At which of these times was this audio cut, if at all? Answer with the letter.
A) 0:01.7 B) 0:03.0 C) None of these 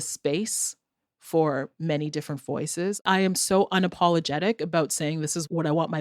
B